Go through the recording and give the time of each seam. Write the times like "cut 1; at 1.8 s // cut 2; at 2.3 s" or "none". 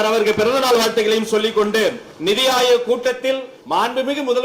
cut 1; at 2.1 s // cut 2; at 3.5 s